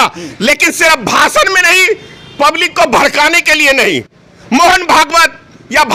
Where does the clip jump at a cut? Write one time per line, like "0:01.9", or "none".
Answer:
none